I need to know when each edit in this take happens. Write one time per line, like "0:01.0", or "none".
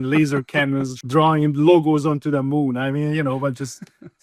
0:01.0